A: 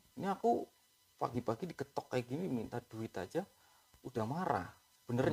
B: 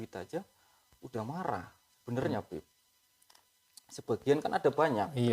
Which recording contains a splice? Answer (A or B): B